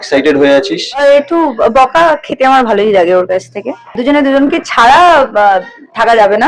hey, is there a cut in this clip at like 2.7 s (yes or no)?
no